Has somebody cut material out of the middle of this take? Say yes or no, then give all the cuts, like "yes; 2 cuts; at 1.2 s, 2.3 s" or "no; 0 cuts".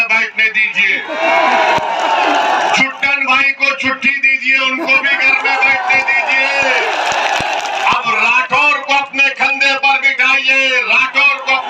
no; 0 cuts